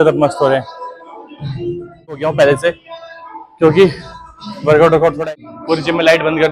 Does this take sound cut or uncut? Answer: cut